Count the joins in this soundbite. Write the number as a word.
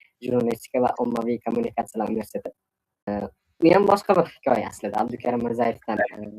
two